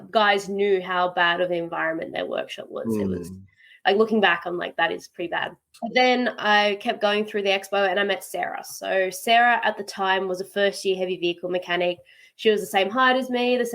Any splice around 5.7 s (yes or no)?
yes